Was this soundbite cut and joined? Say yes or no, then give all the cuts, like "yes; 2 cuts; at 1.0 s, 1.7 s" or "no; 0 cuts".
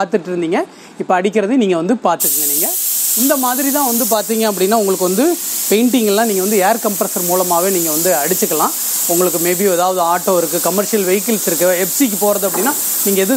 no; 0 cuts